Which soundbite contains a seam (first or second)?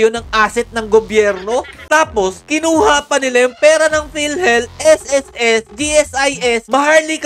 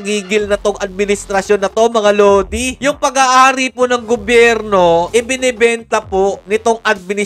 first